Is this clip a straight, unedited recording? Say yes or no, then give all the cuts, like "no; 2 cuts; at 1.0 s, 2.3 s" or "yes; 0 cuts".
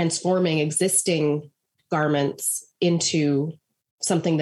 yes; 0 cuts